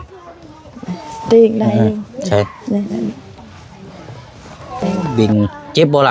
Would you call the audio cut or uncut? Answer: cut